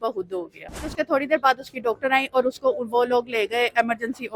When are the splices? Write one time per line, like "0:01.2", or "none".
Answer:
0:00.9

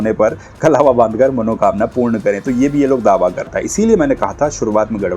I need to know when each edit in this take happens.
0:03.5

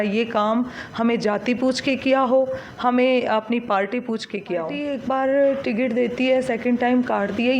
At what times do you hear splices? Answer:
0:04.8

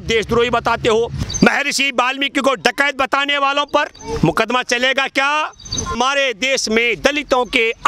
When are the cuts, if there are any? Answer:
0:01.2
0:06.0

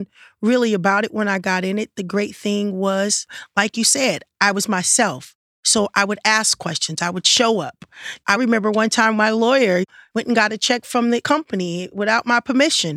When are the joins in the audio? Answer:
0:08.3

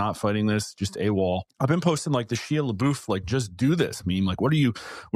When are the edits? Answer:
0:01.5

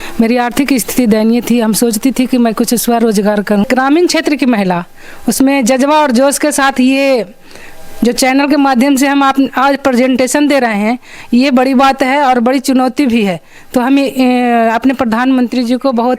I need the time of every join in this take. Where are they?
0:03.7

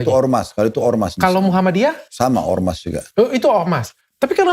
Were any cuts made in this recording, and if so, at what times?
0:01.2
0:02.1

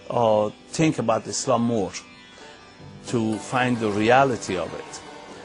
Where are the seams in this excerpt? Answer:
0:01.8

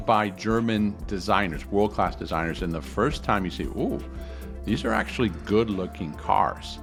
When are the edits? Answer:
none

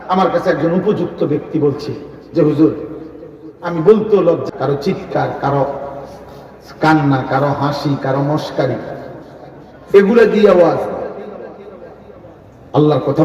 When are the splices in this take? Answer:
0:04.5

